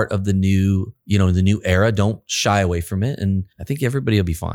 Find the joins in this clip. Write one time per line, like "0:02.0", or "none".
0:00.9
0:03.6